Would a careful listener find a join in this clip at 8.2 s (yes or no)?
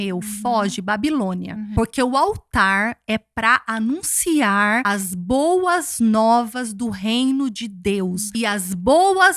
yes